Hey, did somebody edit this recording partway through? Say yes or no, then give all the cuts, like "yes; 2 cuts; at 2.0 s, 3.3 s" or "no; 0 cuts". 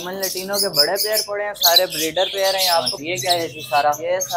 yes; 1 cut; at 3.0 s